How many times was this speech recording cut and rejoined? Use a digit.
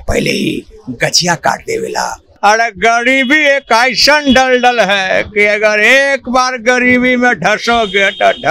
1